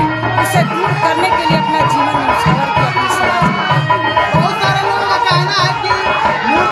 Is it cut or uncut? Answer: uncut